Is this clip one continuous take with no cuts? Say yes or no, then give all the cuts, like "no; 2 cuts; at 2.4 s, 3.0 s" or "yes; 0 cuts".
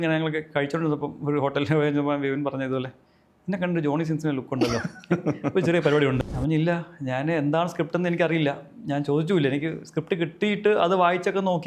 no; 1 cut; at 6.2 s